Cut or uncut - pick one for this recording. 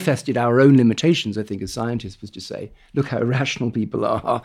uncut